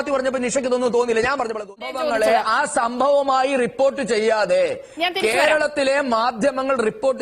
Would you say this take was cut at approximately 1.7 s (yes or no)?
yes